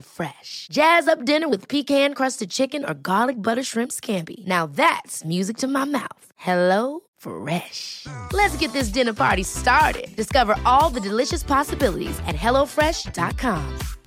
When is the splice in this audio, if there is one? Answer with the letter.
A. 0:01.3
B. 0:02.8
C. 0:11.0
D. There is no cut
D